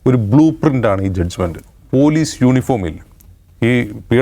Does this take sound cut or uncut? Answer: cut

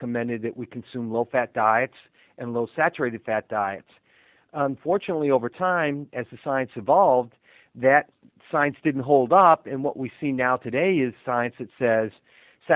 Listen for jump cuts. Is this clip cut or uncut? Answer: uncut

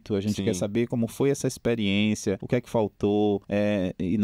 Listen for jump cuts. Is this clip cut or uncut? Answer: cut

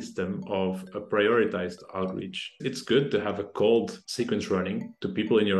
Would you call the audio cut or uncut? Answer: cut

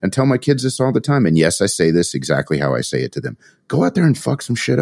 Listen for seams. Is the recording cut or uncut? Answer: uncut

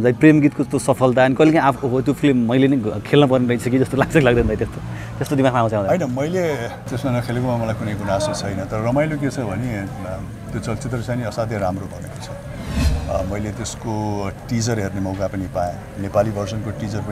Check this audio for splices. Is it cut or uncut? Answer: uncut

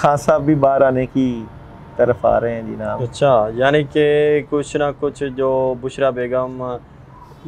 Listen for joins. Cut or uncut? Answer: uncut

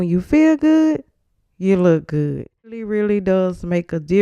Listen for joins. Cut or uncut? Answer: cut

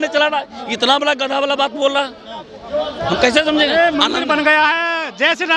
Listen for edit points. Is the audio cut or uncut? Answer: uncut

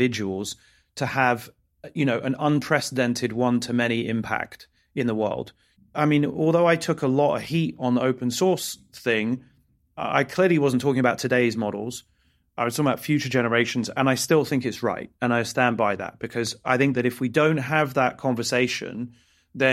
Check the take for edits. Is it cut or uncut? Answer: cut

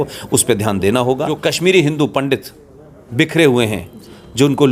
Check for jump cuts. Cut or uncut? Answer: cut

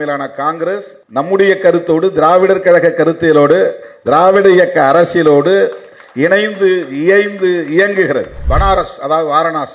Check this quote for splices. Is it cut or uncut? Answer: cut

